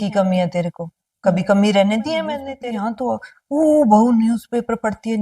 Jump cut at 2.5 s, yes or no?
yes